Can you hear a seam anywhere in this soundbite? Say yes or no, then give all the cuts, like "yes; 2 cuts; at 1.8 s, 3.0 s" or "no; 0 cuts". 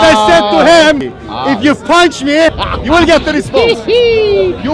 yes; 2 cuts; at 1.0 s, 2.7 s